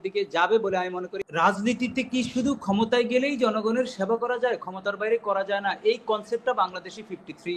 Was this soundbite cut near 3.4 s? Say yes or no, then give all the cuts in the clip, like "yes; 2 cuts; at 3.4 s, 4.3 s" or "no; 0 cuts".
no; 1 cut; at 1.1 s